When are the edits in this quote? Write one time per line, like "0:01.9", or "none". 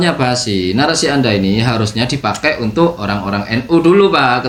none